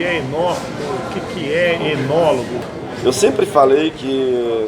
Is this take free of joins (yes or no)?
no